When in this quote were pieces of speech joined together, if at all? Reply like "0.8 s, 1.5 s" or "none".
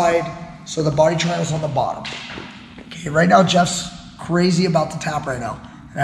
none